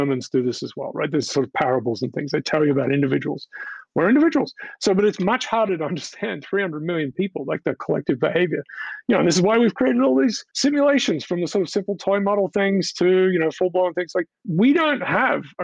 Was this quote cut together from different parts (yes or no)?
no